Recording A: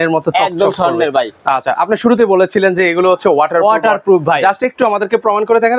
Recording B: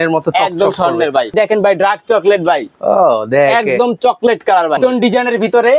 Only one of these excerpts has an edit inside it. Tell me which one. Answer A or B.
B